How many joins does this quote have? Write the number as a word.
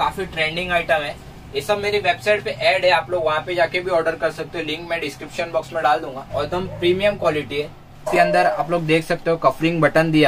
two